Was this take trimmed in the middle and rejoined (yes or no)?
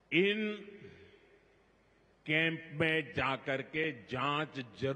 no